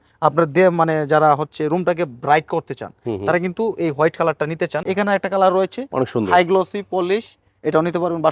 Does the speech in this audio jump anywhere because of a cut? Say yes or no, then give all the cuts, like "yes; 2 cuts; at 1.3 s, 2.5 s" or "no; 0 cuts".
yes; 1 cut; at 4.8 s